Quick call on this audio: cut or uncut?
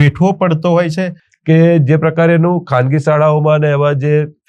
cut